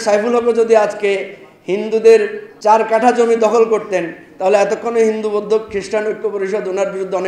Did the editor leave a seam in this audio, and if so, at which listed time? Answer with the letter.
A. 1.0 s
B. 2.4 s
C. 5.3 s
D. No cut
B